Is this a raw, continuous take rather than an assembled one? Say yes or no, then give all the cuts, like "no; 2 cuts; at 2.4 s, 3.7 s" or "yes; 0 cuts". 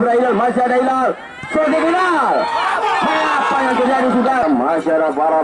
no; 1 cut; at 4.4 s